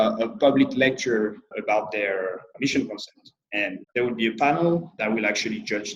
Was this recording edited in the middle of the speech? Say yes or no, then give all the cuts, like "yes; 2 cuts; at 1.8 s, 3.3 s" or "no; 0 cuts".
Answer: yes; 4 cuts; at 1.5 s, 2.5 s, 3.8 s, 4.9 s